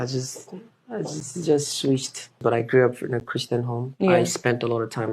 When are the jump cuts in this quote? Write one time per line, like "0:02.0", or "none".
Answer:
0:02.4